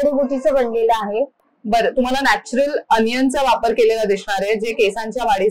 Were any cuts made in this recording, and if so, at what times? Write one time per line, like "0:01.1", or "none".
0:01.4